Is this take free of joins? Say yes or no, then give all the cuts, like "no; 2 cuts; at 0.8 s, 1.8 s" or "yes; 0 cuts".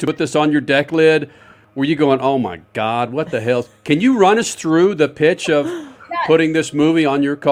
yes; 0 cuts